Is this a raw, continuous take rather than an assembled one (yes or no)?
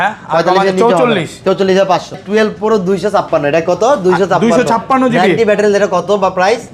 no